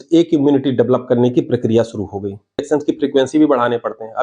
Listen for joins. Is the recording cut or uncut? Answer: cut